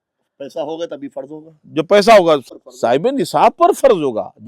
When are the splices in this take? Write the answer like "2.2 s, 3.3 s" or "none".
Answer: 2.5 s